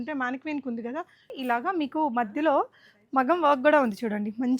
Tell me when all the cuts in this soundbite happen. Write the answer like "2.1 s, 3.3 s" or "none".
1.3 s